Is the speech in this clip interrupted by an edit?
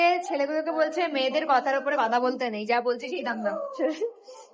no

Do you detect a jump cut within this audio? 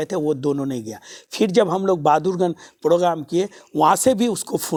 no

